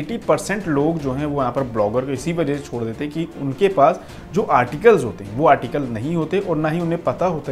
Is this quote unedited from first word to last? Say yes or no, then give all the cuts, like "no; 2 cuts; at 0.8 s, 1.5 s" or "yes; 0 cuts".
yes; 0 cuts